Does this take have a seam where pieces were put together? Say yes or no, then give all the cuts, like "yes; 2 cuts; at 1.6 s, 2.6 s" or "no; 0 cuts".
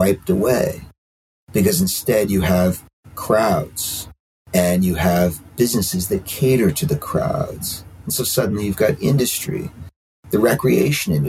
no; 0 cuts